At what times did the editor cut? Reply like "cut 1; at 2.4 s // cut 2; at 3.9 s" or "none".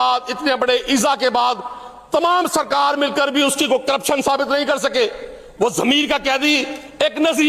none